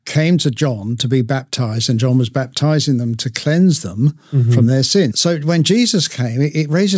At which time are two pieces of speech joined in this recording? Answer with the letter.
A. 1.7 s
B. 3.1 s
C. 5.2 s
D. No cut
C